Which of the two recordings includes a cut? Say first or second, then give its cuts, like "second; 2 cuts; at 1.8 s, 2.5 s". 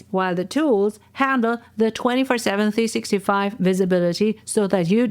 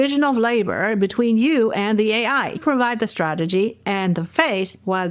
second; 1 cut; at 2.6 s